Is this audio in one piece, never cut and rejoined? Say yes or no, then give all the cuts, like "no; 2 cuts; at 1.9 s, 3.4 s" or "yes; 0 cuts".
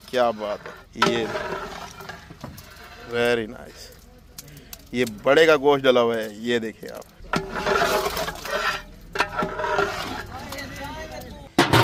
yes; 0 cuts